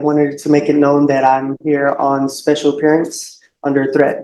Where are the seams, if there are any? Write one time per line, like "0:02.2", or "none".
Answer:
none

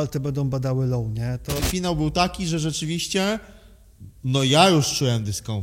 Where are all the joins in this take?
0:01.6

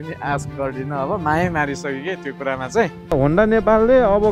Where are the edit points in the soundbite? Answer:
0:03.2

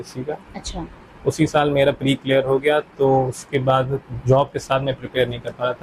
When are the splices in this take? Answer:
none

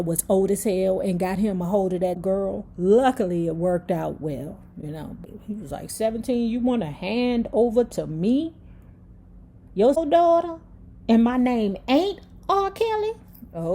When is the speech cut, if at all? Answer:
0:02.2
0:05.3
0:10.0

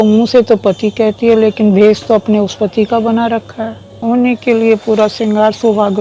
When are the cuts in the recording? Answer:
0:04.0

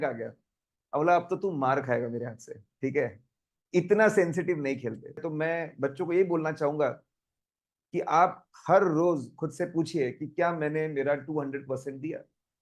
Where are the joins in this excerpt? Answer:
0:05.3

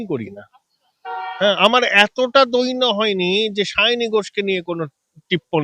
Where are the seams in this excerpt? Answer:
none

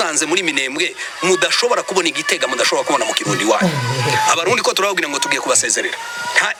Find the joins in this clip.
none

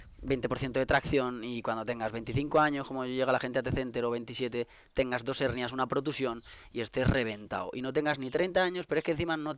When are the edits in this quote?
none

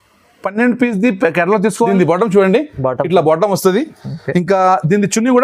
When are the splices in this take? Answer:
0:01.9

